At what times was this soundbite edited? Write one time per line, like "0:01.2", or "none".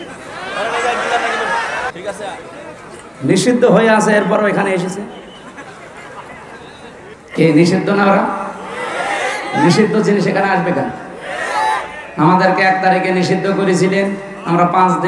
0:01.9
0:07.1